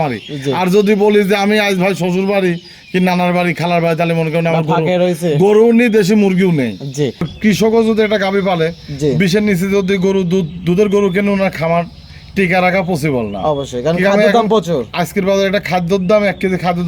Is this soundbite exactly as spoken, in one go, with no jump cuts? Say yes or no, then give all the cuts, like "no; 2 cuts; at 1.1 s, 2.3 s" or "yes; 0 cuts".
no; 1 cut; at 7.2 s